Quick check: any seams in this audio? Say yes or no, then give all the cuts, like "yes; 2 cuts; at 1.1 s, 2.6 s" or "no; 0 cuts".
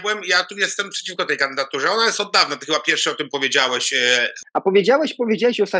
yes; 1 cut; at 4.4 s